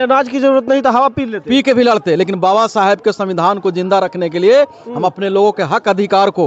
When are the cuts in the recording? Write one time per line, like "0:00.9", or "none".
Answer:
none